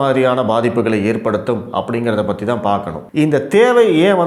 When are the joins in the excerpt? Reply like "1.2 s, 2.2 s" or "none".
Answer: 3.0 s